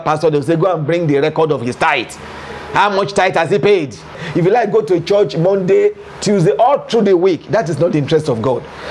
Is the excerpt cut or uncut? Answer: cut